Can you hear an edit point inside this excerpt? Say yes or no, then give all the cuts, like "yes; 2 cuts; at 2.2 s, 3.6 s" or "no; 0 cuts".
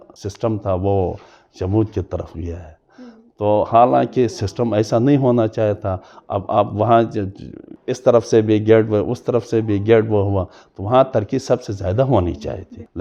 no; 0 cuts